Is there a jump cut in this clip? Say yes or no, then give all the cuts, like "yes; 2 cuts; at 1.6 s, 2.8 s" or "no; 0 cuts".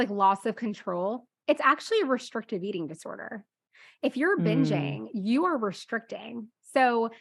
no; 0 cuts